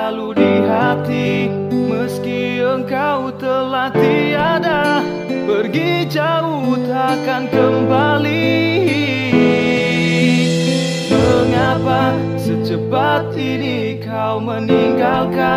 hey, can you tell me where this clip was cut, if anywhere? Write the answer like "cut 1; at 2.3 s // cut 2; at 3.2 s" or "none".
none